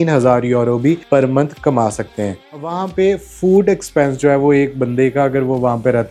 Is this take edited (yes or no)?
no